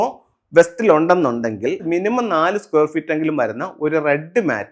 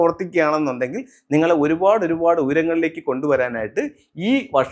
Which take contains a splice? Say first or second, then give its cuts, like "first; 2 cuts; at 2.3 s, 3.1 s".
first; 1 cut; at 1.8 s